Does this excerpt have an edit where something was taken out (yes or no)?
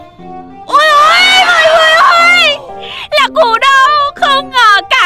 no